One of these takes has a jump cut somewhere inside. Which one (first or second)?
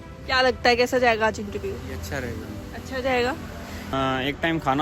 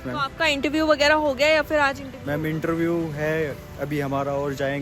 first